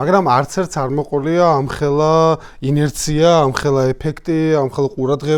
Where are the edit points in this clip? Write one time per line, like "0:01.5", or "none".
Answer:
none